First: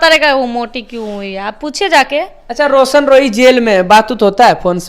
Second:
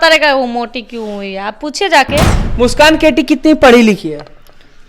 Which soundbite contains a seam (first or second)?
second